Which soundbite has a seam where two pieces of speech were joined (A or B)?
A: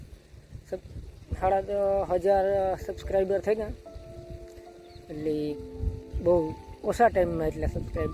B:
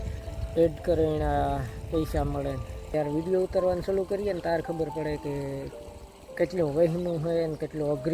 B